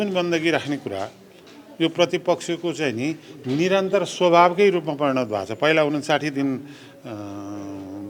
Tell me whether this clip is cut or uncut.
uncut